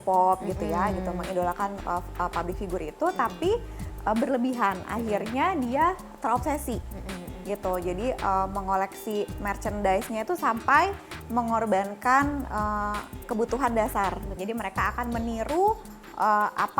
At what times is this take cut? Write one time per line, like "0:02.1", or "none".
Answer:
0:14.4